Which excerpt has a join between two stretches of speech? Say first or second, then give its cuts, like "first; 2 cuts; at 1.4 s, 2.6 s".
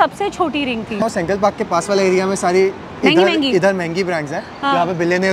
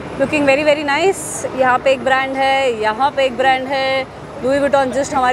first; 1 cut; at 1.0 s